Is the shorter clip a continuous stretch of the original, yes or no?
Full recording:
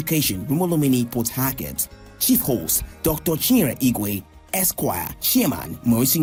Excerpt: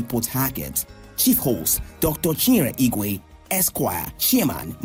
yes